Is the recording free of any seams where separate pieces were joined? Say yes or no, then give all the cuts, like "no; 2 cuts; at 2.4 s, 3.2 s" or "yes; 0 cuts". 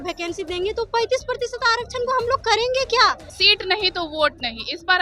no; 1 cut; at 3.3 s